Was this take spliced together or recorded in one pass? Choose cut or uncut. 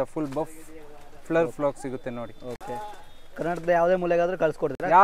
uncut